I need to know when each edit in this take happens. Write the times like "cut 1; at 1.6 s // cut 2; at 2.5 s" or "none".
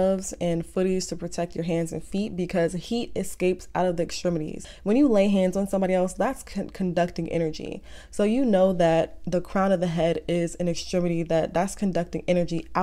cut 1; at 4.7 s